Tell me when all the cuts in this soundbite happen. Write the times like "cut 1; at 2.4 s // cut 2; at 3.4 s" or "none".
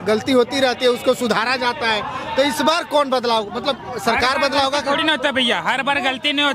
none